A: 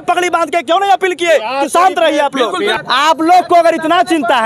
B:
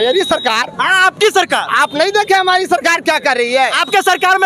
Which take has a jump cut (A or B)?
A